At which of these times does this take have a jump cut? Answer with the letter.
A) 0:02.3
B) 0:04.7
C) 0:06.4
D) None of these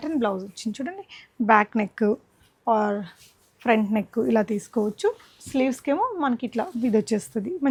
D